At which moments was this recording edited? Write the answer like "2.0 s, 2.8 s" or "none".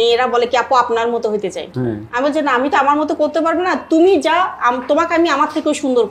none